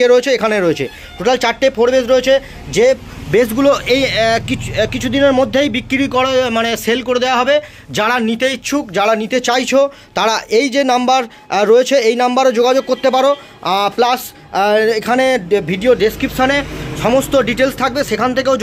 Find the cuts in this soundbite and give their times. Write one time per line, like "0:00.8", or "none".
none